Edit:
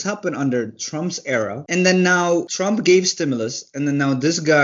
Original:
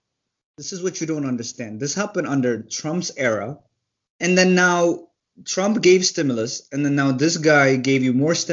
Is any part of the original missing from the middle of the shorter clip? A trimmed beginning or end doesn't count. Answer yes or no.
yes